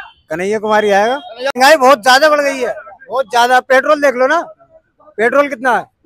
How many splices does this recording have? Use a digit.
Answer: 1